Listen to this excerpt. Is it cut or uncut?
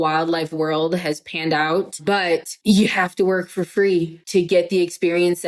uncut